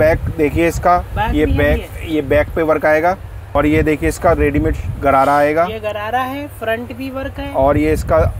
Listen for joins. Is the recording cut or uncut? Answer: cut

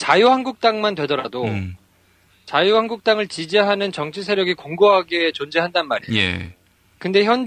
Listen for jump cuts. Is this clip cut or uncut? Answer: cut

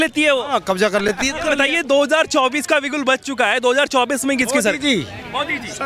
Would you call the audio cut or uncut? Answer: cut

